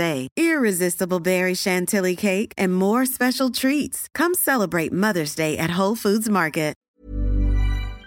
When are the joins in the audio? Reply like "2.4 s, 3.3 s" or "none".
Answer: 6.8 s